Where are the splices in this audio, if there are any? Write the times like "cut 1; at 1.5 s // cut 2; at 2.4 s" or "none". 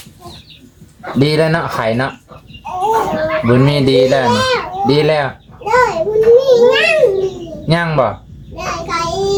none